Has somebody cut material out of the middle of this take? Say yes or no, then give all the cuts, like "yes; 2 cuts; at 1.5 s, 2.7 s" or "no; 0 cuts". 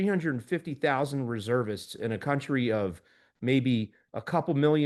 no; 0 cuts